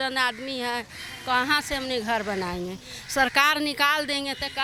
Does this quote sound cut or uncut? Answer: uncut